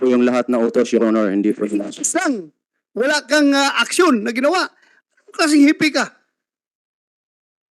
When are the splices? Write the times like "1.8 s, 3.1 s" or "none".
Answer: none